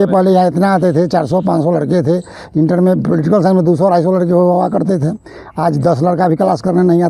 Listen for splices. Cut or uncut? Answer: uncut